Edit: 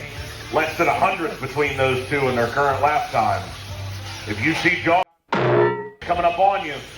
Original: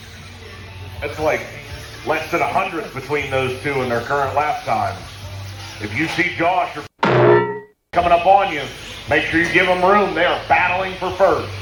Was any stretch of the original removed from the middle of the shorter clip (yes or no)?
yes